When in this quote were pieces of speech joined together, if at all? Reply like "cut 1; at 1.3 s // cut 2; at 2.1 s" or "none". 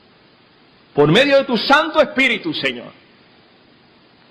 cut 1; at 1.7 s